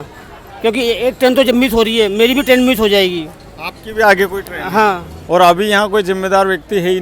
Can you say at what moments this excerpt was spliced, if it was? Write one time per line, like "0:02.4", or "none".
0:05.1